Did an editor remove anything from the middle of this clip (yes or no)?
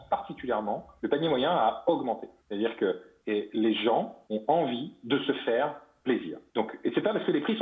yes